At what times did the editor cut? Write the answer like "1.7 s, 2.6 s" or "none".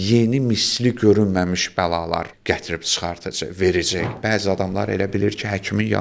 2.3 s, 4.1 s